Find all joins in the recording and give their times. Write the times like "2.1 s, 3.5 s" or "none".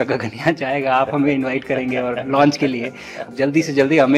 3.2 s